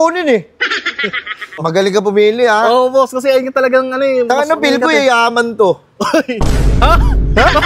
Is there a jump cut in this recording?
yes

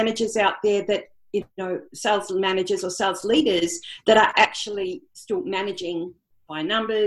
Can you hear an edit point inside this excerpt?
no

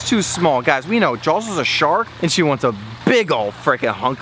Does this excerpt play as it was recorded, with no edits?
yes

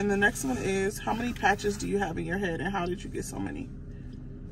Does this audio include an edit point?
no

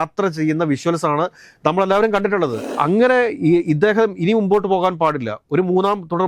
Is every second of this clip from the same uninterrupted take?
no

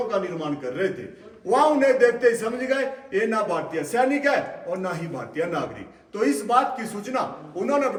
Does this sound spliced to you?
no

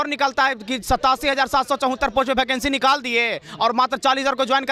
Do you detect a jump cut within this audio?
no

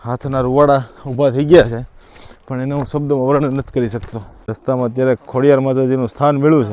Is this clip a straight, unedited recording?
yes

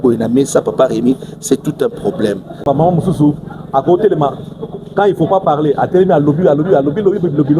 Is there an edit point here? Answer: yes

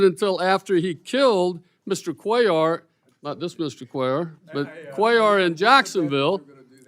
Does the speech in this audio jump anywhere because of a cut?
no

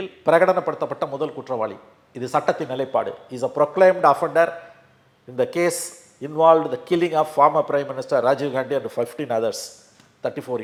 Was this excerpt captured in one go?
yes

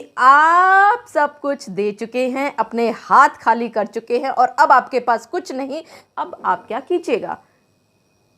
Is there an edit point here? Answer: yes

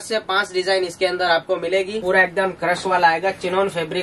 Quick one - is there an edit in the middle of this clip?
yes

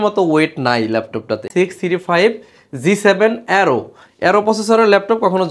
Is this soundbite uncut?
no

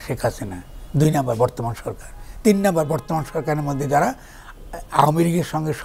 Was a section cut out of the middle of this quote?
no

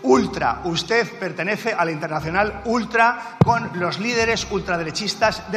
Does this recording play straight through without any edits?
yes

